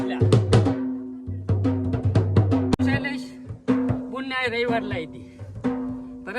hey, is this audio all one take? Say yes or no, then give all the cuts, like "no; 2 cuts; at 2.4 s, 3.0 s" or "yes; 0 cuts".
no; 1 cut; at 2.8 s